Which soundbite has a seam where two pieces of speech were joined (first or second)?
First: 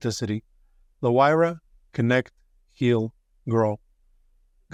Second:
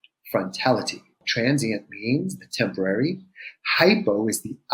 second